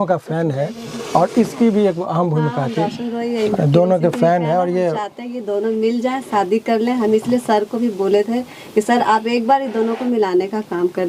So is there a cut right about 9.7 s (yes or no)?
no